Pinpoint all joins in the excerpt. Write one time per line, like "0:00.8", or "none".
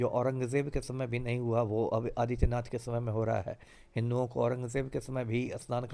none